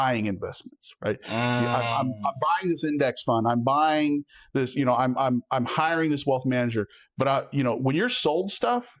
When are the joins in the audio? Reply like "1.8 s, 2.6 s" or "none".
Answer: none

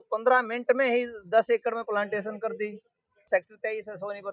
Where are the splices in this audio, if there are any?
3.3 s

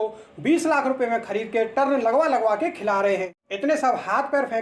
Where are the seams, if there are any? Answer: 3.4 s

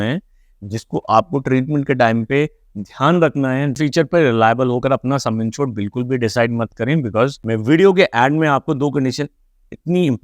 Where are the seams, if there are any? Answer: 3.8 s, 7.4 s

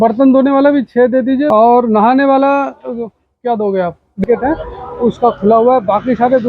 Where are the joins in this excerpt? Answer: 1.5 s, 4.2 s

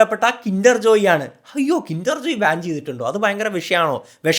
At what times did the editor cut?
none

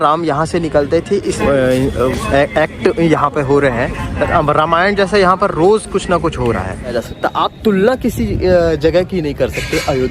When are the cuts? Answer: 1.4 s, 7.0 s

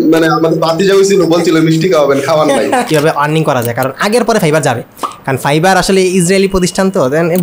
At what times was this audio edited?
2.9 s

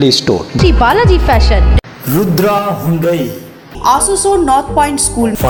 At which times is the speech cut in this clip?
none

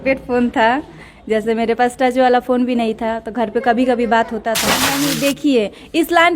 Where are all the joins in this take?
4.8 s

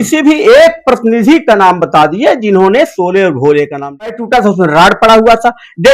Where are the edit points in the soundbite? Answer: 4.1 s

